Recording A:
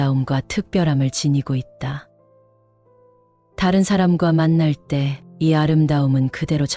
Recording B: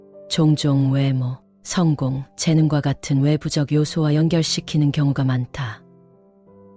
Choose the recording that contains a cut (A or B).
A